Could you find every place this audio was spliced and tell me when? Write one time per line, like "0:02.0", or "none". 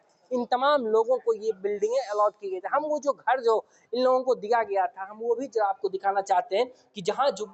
none